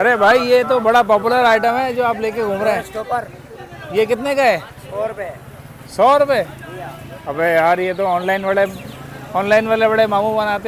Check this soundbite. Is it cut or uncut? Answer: uncut